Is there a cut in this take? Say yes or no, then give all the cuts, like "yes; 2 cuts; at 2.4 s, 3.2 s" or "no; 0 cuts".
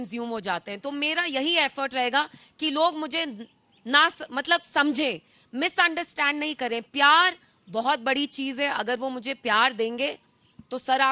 no; 0 cuts